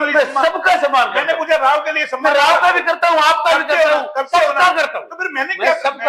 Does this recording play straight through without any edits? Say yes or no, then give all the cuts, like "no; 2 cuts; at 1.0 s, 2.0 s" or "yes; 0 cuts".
yes; 0 cuts